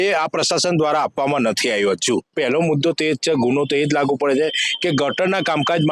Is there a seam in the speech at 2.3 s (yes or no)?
yes